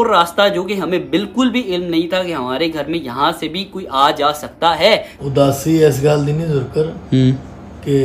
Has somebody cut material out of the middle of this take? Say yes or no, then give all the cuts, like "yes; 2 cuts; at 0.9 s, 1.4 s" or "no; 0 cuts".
yes; 1 cut; at 5.1 s